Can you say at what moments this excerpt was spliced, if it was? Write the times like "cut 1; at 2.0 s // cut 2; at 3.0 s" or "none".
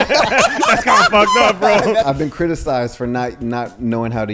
cut 1; at 2.1 s